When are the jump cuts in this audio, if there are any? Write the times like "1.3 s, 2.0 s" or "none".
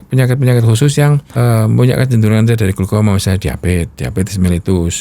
1.3 s